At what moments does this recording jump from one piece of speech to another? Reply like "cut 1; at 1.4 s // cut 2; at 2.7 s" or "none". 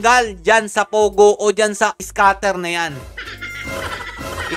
none